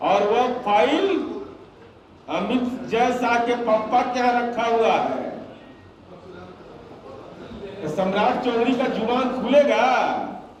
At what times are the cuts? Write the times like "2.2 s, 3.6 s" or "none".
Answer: none